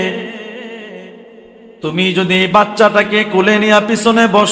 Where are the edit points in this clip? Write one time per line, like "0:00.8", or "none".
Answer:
none